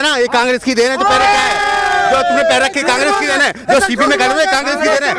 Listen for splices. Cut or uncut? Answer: uncut